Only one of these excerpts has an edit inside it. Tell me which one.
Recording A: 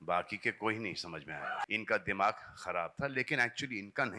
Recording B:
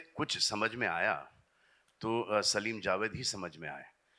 A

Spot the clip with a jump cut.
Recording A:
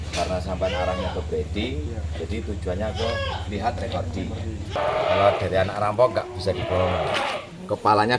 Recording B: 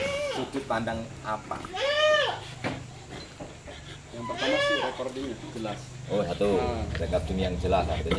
A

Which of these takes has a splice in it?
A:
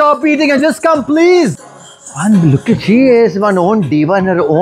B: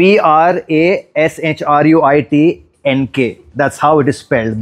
A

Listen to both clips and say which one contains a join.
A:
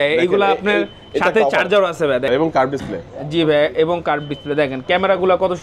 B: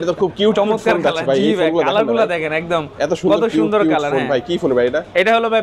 A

